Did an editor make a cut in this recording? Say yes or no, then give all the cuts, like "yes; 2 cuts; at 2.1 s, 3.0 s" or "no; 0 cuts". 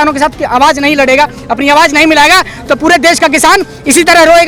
no; 0 cuts